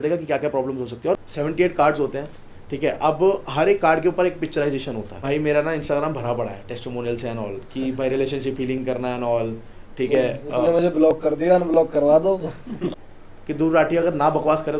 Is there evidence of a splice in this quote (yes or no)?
yes